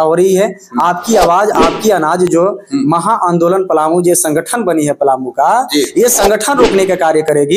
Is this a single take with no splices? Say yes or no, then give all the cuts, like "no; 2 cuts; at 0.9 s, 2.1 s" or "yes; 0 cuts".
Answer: yes; 0 cuts